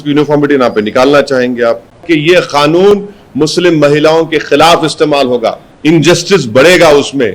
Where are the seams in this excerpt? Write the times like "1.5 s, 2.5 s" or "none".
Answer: 2.0 s, 5.7 s